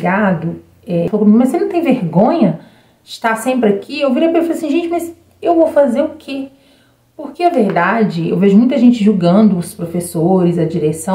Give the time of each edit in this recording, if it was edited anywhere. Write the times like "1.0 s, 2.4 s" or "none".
1.1 s